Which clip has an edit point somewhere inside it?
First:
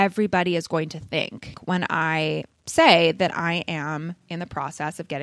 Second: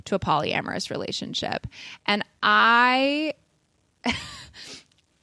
first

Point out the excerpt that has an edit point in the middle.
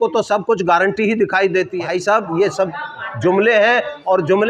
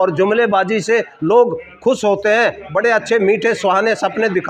first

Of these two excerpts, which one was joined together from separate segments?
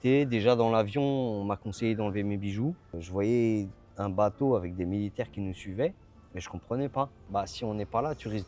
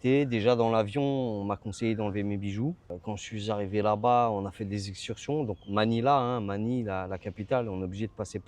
first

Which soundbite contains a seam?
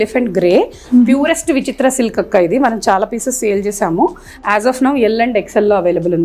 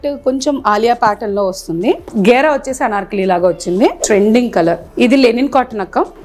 second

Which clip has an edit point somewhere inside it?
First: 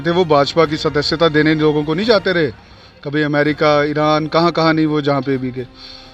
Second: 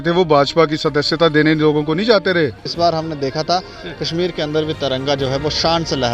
second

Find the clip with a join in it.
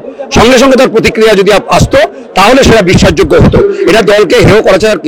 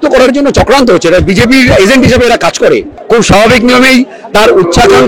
second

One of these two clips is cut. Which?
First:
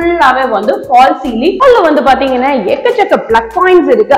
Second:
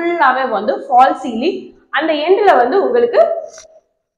first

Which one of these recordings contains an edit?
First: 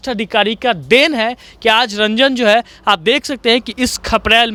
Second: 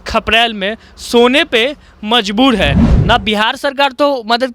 second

